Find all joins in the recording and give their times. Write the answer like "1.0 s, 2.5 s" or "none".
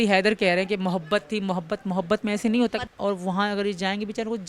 2.9 s